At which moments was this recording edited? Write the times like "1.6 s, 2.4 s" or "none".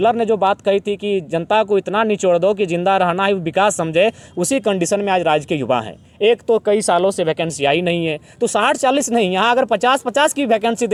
none